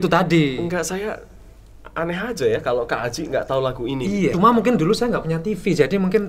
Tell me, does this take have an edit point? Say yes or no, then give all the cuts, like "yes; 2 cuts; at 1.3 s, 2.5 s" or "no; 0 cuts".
yes; 1 cut; at 4.3 s